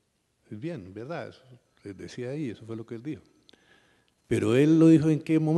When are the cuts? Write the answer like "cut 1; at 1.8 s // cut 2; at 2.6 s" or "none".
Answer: none